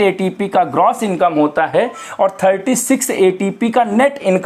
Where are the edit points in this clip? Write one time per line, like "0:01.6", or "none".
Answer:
none